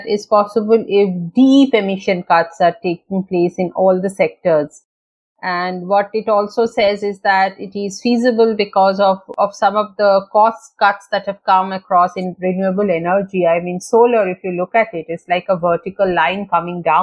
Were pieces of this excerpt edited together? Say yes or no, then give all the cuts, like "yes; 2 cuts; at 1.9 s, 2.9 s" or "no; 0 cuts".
no; 0 cuts